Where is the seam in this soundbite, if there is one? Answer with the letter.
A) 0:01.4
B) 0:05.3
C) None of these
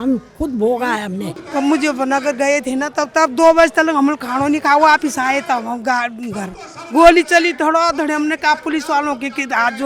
A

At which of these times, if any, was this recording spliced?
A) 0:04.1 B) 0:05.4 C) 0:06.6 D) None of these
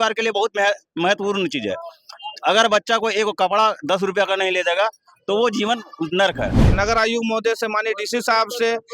C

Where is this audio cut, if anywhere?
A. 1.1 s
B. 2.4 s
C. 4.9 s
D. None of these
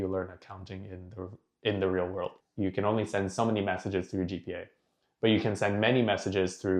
B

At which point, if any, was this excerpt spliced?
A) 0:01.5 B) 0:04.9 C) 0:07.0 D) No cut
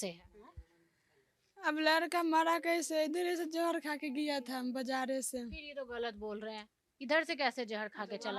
D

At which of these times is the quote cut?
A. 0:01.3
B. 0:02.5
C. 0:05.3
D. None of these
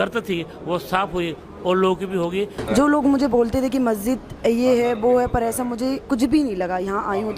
B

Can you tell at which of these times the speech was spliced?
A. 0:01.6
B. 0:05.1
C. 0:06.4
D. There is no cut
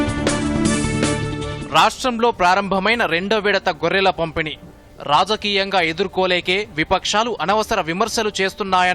A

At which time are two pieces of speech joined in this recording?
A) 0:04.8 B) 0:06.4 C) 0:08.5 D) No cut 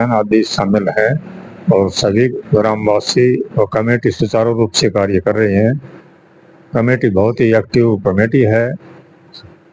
D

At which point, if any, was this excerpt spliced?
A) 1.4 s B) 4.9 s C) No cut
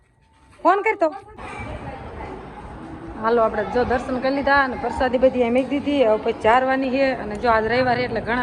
A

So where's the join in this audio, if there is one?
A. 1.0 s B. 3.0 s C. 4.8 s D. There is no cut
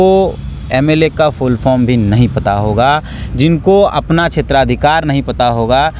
D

